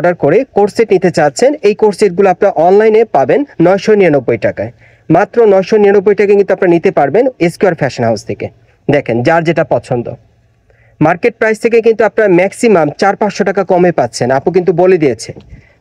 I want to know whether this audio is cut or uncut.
uncut